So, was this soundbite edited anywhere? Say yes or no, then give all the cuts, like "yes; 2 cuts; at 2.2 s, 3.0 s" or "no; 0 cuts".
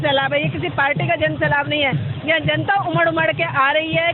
no; 0 cuts